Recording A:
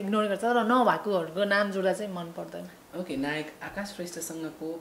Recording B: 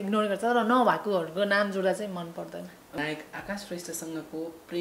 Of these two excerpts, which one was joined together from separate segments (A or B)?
B